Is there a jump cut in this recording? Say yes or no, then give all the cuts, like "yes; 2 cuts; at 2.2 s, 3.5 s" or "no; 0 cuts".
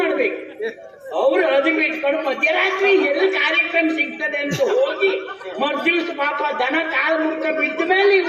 no; 0 cuts